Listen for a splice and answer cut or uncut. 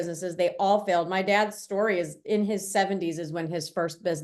uncut